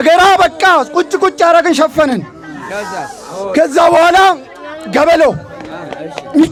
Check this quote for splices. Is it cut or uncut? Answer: uncut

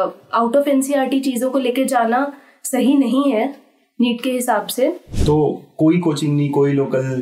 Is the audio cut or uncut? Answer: cut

